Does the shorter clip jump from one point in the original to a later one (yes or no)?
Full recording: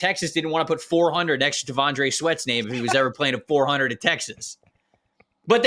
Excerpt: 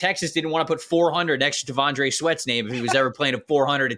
no